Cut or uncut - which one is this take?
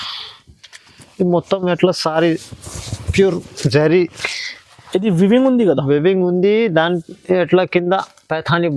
uncut